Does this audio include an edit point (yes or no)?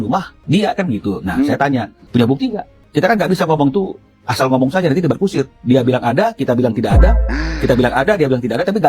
no